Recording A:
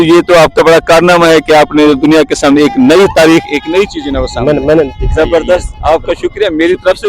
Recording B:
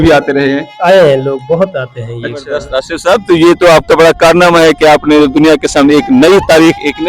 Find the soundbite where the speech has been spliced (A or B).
B